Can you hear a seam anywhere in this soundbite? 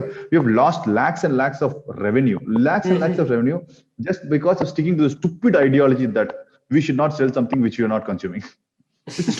no; 0 cuts

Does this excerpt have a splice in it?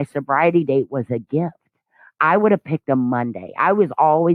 no; 0 cuts

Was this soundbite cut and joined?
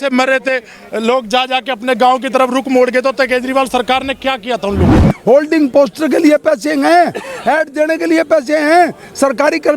yes; 1 cut; at 4.9 s

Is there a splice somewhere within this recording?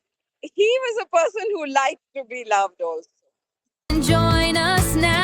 yes; 1 cut; at 3.9 s

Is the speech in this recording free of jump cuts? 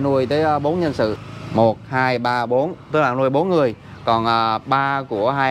no; 1 cut; at 1.2 s

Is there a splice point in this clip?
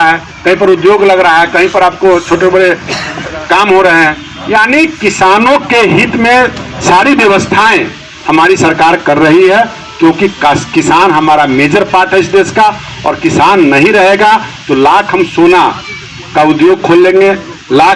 no; 0 cuts

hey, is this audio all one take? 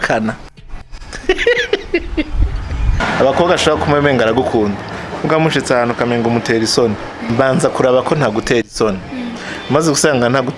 no; 1 cut; at 3.0 s

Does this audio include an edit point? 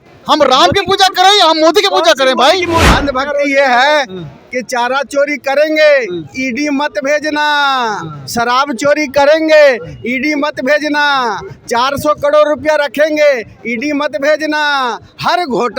yes; 1 cut; at 2.9 s

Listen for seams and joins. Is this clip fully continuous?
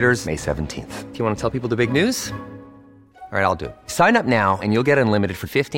yes; 0 cuts

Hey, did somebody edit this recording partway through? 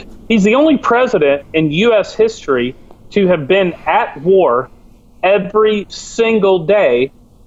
no; 0 cuts

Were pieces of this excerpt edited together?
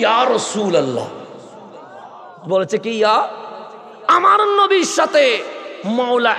no; 0 cuts

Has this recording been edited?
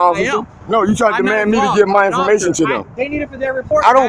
no; 0 cuts

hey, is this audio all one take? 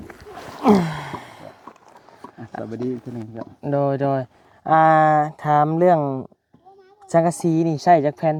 yes; 0 cuts

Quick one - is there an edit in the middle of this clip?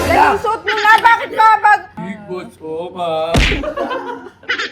yes; 1 cut; at 2.0 s

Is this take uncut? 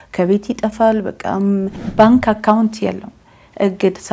no; 1 cut; at 1.8 s

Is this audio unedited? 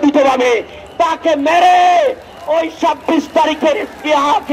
yes; 0 cuts

